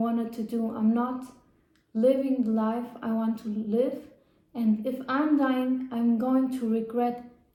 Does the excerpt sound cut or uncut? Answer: uncut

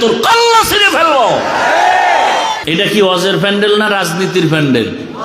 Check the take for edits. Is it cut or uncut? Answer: cut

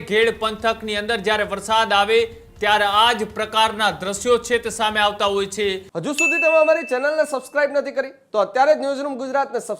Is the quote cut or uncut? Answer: cut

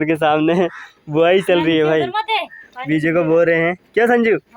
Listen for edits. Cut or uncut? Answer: uncut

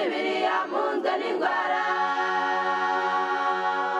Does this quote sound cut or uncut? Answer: uncut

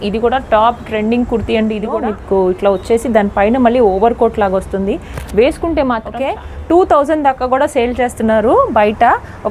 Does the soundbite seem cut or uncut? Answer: cut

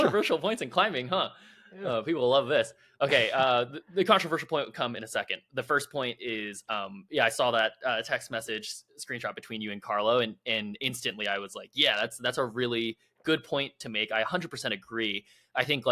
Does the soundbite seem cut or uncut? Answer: uncut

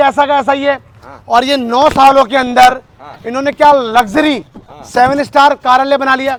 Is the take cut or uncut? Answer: uncut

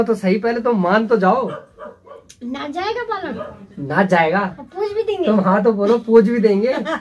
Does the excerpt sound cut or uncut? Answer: uncut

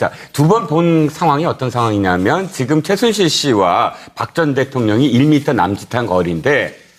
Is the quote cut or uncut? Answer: uncut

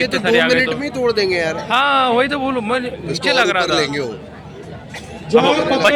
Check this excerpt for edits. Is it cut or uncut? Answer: uncut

